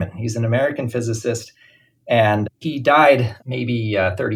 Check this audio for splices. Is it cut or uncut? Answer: uncut